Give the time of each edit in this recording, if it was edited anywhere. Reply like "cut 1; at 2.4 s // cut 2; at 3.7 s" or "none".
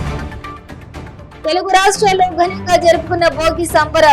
cut 1; at 1.3 s

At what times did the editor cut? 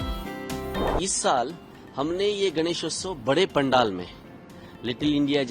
cut 1; at 0.9 s

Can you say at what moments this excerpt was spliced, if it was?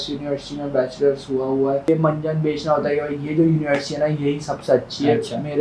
cut 1; at 1.9 s

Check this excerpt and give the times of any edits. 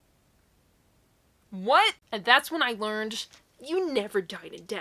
cut 1; at 1.9 s

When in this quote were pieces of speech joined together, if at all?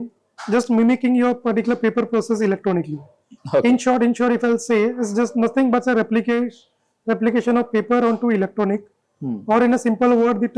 none

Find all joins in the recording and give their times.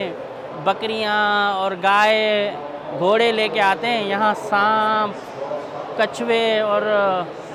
none

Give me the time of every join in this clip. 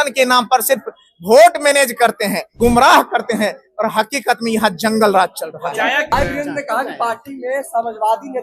cut 1; at 2.4 s // cut 2; at 6.1 s

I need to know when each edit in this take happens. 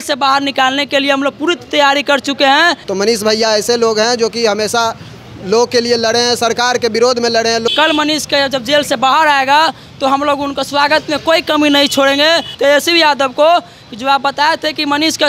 cut 1; at 2.8 s // cut 2; at 7.7 s // cut 3; at 12.5 s

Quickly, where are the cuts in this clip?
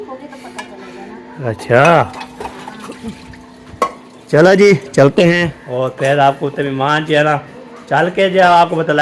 none

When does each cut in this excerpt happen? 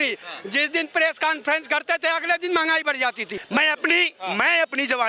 cut 1; at 3.3 s

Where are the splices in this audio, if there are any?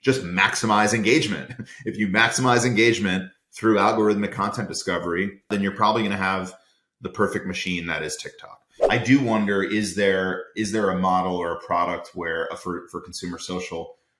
cut 1; at 5.5 s // cut 2; at 8.7 s

